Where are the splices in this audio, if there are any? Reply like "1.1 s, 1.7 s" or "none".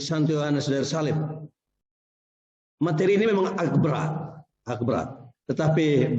none